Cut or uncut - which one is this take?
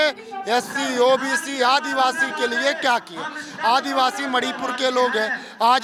uncut